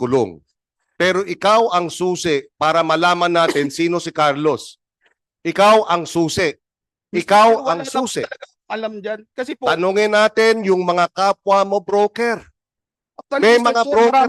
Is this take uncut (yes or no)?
yes